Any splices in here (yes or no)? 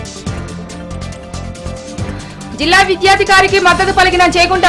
yes